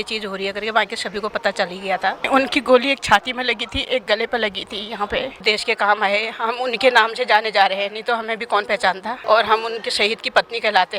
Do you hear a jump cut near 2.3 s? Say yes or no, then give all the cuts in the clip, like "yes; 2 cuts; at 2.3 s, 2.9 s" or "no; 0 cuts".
yes; 3 cuts; at 2.3 s, 5.4 s, 9.1 s